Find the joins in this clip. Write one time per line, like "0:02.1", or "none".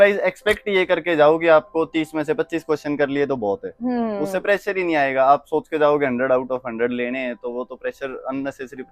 none